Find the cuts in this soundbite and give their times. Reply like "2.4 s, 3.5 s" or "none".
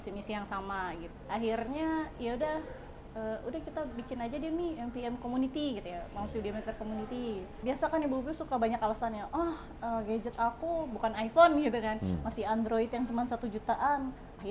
1.1 s, 7.6 s